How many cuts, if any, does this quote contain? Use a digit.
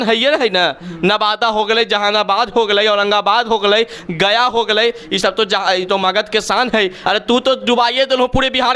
1